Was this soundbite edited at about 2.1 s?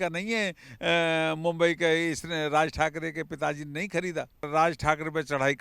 no; 1 cut; at 4.5 s

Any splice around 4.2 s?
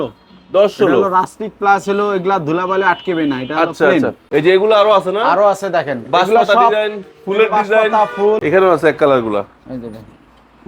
yes; 2 cuts; at 4.2 s, 8.4 s

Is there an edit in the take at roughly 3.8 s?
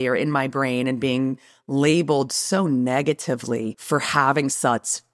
yes; 1 cut; at 3.8 s

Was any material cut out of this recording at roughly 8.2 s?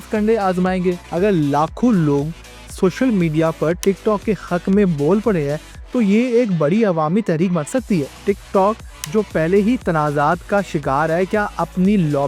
yes; 2 cuts; at 1.0 s, 8.2 s

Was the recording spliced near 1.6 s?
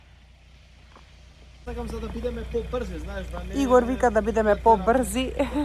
yes; 1 cut; at 1.6 s

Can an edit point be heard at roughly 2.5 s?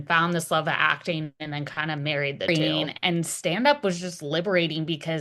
yes; 1 cut; at 2.5 s

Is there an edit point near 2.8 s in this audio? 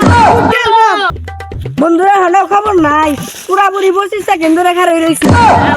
no; 1 cut; at 1.1 s

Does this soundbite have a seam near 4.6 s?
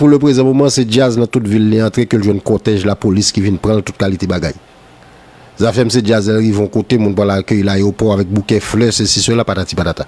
no; 0 cuts

